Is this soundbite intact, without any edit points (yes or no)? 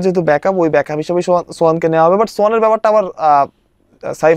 yes